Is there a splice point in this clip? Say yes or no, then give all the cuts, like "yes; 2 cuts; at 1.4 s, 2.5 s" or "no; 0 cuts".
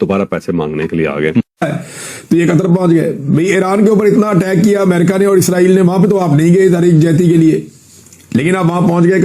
yes; 1 cut; at 1.8 s